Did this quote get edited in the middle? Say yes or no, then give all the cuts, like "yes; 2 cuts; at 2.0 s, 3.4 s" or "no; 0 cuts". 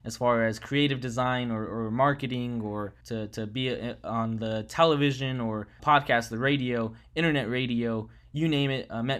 yes; 2 cuts; at 3.0 s, 5.7 s